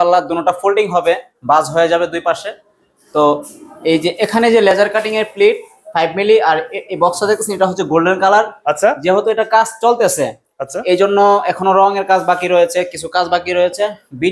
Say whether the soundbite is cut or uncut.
uncut